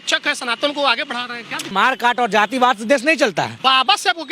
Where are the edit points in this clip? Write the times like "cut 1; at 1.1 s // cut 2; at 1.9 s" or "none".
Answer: cut 1; at 1.7 s // cut 2; at 3.6 s